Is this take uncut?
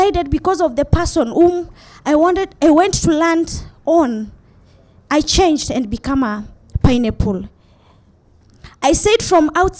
yes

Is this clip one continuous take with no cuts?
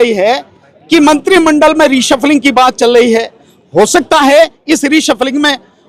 yes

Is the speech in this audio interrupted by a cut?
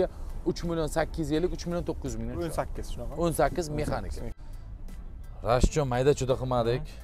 yes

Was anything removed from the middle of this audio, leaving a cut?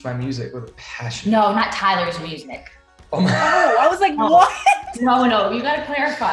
no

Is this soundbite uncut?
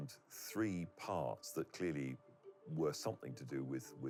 yes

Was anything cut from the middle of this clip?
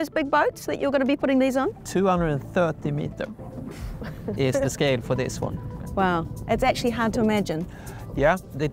no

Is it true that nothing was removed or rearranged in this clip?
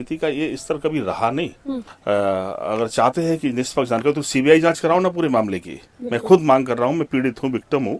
no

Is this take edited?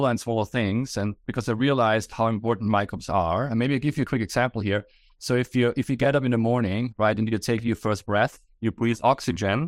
no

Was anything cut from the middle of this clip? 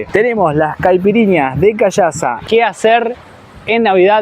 yes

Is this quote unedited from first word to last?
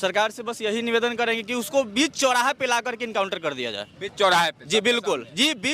yes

